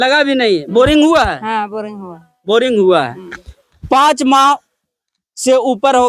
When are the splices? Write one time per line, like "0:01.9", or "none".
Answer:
none